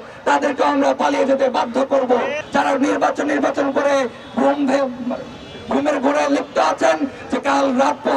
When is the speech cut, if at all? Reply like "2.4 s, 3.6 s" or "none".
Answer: 2.4 s